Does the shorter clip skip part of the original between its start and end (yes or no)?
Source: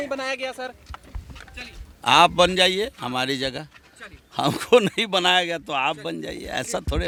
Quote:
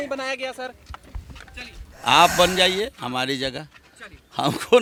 no